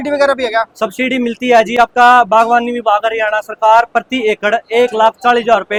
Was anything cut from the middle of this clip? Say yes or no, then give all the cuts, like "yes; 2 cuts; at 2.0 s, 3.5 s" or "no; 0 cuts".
no; 0 cuts